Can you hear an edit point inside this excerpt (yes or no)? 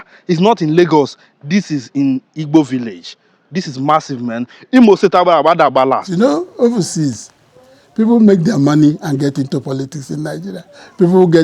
yes